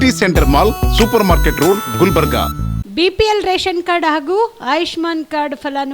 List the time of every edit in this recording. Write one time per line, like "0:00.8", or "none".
0:02.8